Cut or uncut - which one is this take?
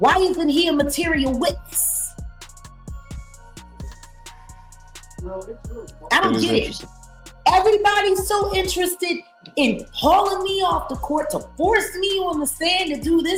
uncut